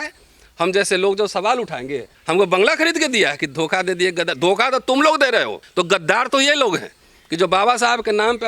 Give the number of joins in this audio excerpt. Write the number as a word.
two